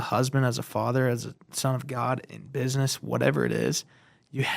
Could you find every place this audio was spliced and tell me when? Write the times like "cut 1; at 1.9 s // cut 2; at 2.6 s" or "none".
none